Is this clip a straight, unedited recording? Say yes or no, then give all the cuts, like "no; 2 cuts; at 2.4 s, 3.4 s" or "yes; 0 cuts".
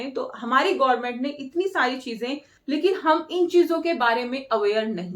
no; 1 cut; at 2.5 s